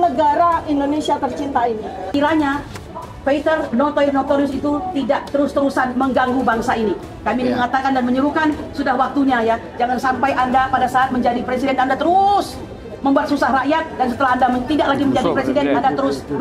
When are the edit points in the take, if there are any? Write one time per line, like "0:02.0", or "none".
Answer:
0:02.1